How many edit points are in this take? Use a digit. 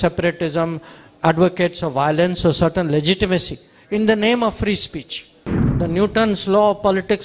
1